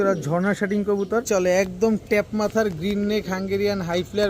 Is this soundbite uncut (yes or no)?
no